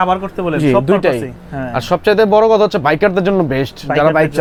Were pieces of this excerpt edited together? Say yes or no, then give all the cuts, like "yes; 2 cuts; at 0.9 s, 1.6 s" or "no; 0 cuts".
no; 0 cuts